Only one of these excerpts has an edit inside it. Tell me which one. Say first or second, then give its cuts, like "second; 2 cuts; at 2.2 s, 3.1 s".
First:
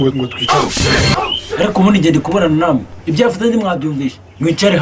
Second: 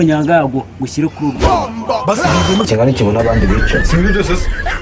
second; 1 cut; at 2.7 s